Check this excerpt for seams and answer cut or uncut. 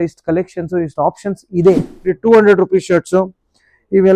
cut